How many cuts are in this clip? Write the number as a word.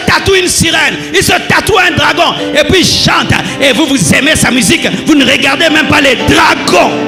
zero